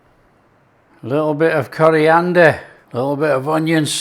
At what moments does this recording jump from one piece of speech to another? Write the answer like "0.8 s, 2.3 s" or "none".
2.8 s